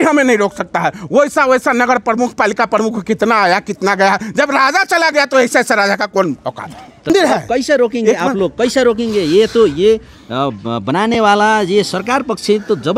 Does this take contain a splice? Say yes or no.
yes